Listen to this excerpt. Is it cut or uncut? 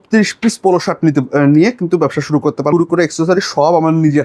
cut